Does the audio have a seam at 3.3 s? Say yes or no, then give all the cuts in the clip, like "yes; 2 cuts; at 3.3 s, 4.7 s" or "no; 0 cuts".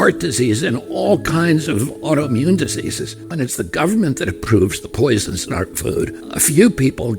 yes; 1 cut; at 3.3 s